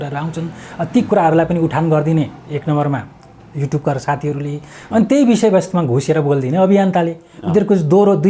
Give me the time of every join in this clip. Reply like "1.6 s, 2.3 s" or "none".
none